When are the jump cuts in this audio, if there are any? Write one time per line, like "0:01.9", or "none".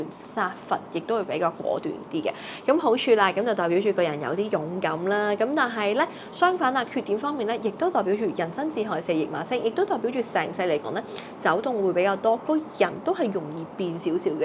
none